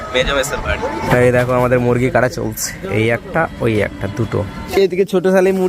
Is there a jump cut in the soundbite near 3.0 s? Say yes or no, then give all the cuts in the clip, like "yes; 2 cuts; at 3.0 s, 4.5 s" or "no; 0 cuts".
no; 2 cuts; at 1.0 s, 4.7 s